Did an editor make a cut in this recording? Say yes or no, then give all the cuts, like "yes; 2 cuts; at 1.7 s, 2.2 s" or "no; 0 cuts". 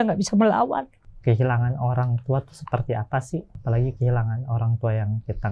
yes; 2 cuts; at 1.0 s, 3.5 s